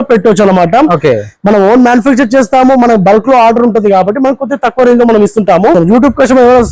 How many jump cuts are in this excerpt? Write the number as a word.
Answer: one